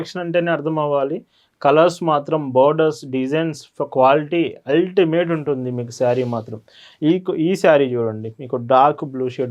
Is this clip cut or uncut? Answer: uncut